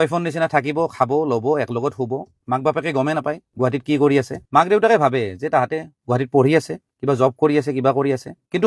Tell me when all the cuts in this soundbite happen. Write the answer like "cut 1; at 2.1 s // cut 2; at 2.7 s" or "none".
none